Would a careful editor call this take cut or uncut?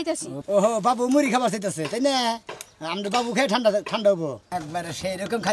cut